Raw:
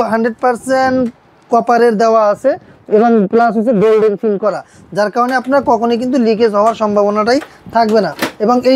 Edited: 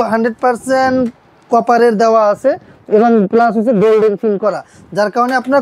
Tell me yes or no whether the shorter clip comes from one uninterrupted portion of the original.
yes